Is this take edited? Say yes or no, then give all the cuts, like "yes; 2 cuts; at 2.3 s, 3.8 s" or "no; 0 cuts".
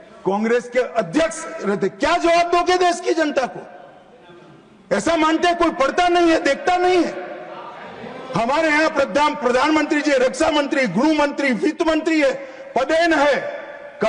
no; 0 cuts